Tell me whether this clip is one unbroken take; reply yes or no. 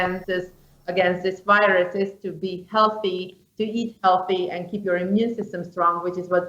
yes